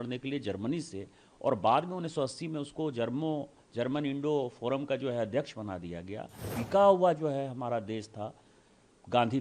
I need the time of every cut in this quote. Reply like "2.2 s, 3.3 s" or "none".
6.4 s